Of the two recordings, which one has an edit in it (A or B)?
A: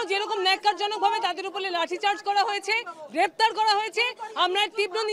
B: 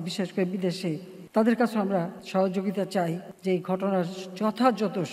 B